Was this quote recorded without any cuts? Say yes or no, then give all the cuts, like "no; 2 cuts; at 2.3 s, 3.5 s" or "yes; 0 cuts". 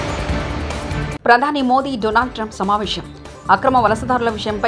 no; 1 cut; at 1.1 s